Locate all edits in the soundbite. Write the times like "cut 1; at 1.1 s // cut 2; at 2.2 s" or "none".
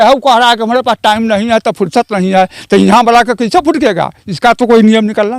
none